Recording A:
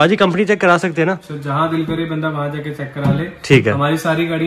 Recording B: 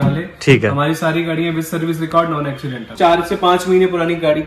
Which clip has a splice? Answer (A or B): B